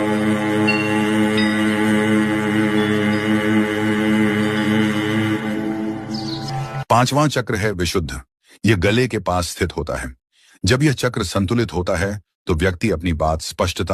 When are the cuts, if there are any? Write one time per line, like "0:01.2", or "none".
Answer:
0:08.6